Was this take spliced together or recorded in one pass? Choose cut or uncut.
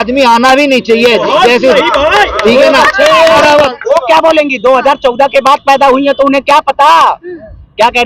cut